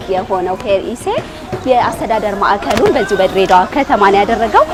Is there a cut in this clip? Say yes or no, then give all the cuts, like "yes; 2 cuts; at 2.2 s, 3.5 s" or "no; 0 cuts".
no; 0 cuts